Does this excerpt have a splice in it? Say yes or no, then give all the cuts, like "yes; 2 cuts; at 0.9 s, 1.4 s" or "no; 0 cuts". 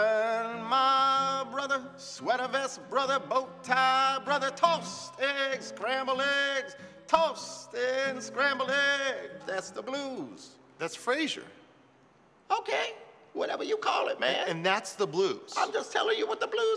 no; 0 cuts